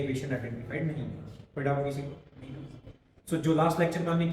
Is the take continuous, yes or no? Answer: yes